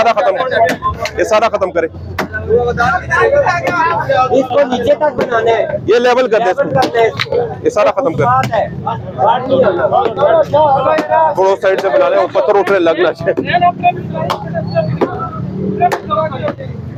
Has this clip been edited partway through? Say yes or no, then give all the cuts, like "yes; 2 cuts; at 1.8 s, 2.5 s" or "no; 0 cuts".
no; 0 cuts